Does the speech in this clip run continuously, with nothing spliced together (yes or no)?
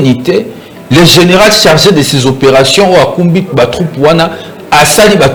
yes